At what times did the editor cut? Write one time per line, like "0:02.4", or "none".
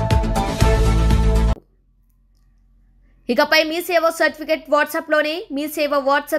0:01.5